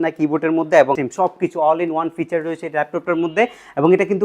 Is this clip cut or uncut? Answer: cut